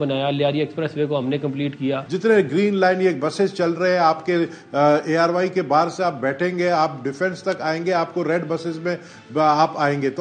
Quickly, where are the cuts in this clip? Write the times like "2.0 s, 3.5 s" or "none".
2.0 s

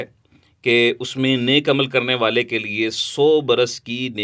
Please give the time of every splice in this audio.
none

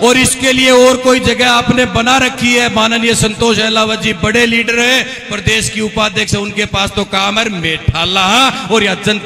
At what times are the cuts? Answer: none

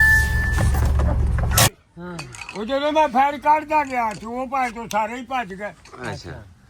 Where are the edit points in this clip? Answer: 1.7 s, 3.2 s

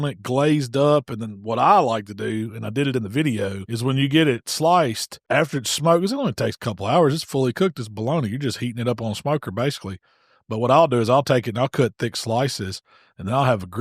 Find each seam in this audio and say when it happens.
3.6 s, 5.1 s

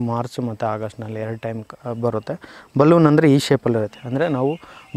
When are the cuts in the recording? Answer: none

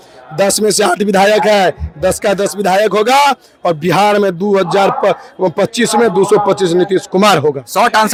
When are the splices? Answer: none

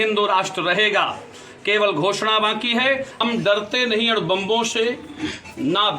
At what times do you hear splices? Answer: 3.2 s

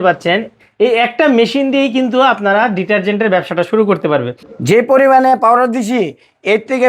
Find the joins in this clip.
4.4 s

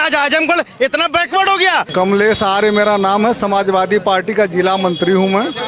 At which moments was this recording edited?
1.9 s

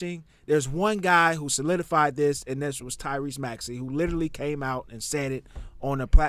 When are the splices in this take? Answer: none

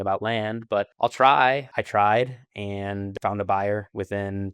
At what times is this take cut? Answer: 1.7 s

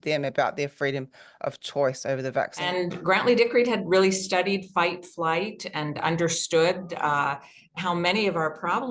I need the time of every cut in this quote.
2.6 s

